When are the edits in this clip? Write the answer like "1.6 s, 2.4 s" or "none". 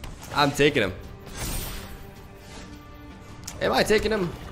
none

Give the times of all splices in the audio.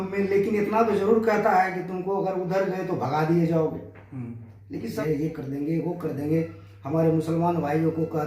5.0 s

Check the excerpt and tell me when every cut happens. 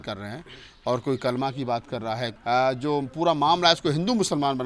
2.3 s

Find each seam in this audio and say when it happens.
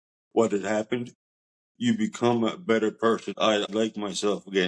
3.7 s

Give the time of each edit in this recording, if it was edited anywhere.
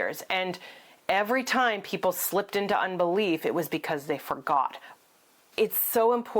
5.4 s

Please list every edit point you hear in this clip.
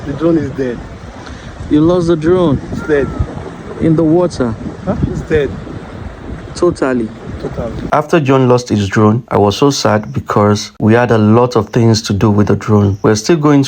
7.8 s

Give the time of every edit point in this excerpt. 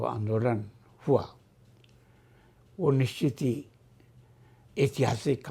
none

